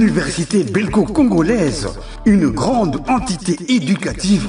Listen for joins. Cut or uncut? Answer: uncut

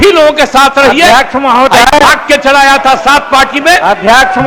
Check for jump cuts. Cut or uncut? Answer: uncut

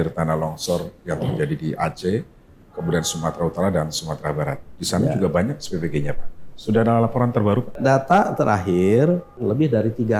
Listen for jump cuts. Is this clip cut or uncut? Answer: cut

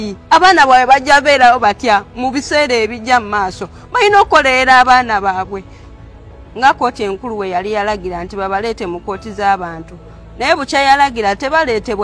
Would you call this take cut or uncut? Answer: uncut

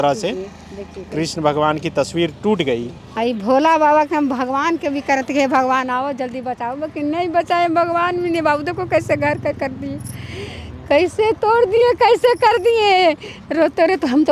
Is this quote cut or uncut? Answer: cut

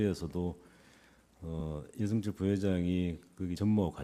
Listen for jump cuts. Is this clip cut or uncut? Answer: uncut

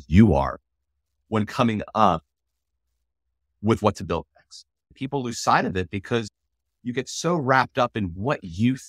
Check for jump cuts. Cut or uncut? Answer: cut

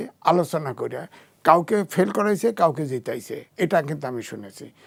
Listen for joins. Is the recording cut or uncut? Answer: uncut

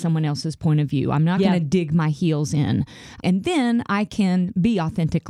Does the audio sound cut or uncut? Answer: cut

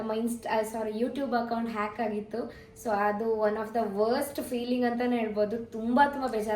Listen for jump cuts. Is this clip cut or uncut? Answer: uncut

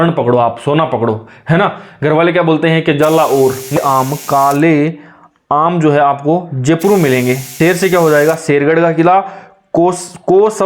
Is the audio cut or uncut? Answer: cut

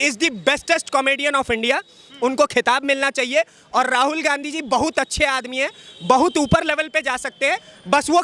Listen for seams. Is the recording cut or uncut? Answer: uncut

